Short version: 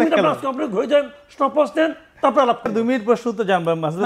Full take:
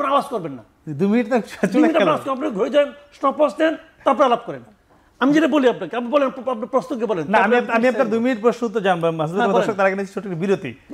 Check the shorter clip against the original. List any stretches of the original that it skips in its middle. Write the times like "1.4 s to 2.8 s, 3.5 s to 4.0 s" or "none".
4.5 s to 8.1 s